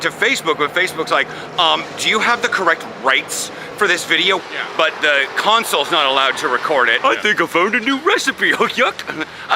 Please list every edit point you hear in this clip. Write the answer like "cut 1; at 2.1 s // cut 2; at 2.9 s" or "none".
cut 1; at 4.4 s // cut 2; at 6.9 s